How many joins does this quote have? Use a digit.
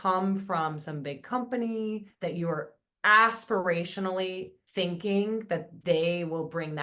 2